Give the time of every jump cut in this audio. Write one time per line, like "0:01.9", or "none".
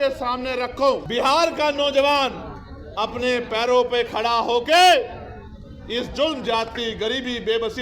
0:01.0